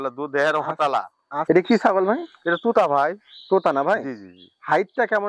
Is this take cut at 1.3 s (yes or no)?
yes